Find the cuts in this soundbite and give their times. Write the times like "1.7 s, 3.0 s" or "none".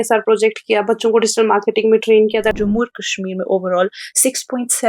2.5 s